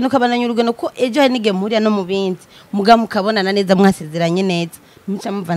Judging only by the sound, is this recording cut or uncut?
uncut